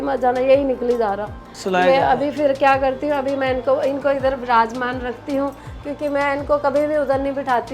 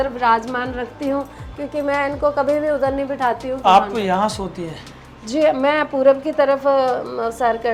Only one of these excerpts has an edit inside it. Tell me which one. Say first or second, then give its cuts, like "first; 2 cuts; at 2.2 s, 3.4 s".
first; 1 cut; at 1.5 s